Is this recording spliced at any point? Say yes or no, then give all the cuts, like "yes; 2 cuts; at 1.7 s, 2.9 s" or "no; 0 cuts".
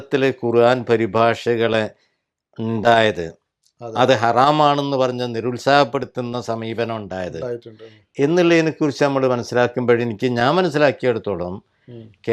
no; 0 cuts